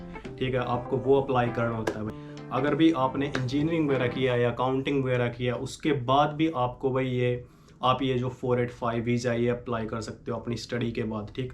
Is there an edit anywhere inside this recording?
yes; 1 cut; at 2.1 s

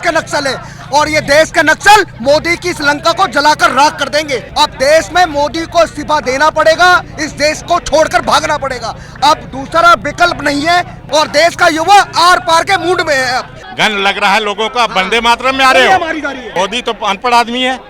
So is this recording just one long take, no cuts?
no; 4 cuts; at 4.4 s, 11.0 s, 13.6 s, 16.4 s

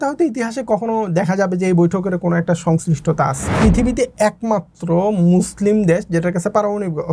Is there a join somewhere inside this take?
yes; 1 cut; at 3.5 s

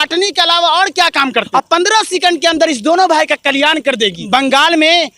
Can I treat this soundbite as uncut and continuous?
no; 2 cuts; at 1.5 s, 4.2 s

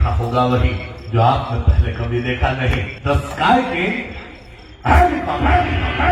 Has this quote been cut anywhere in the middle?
yes; 1 cut; at 2.9 s

